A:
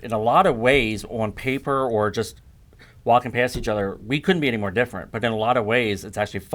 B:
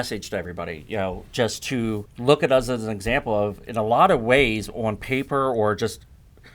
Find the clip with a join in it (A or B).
B